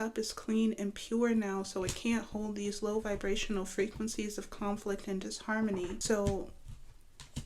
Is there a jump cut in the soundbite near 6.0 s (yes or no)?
yes